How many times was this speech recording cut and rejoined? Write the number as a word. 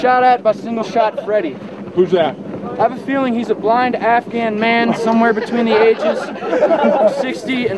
zero